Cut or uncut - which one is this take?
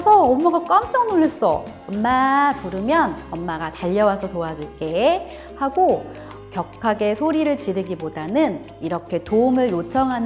uncut